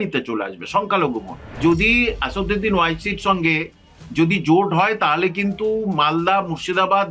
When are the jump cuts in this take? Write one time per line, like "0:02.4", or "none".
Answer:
0:01.6
0:04.0